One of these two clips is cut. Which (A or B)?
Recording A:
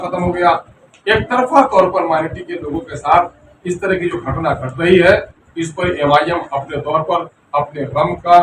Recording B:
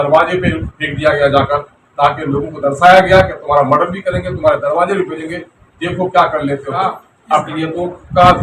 B